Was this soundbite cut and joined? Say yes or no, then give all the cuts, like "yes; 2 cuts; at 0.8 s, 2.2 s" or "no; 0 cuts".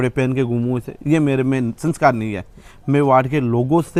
no; 0 cuts